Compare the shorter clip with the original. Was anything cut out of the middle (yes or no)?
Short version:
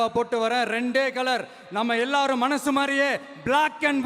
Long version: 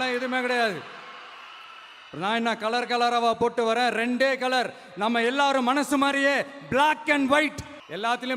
no